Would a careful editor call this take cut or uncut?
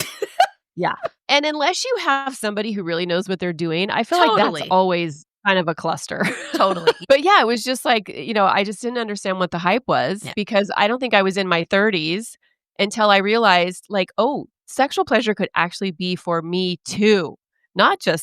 cut